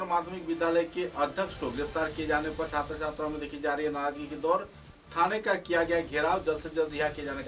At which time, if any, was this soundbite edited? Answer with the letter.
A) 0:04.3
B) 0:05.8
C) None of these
C